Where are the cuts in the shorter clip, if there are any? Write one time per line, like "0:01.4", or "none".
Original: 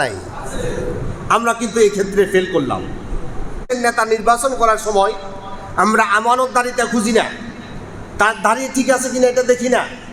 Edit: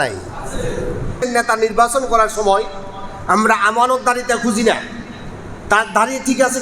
0:01.1